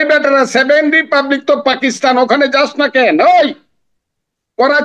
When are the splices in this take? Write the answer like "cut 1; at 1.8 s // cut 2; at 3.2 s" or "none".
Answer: none

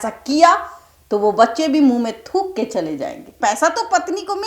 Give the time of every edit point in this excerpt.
cut 1; at 3.4 s

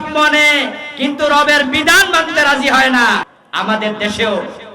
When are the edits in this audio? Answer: cut 1; at 3.4 s

